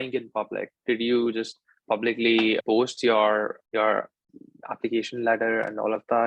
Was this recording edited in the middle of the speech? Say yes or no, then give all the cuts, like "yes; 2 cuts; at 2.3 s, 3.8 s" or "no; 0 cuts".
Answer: no; 0 cuts